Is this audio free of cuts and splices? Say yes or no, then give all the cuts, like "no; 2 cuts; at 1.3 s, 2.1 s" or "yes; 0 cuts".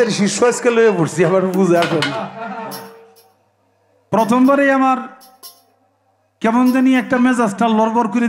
yes; 0 cuts